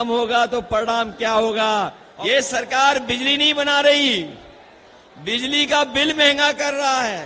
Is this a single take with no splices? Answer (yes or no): no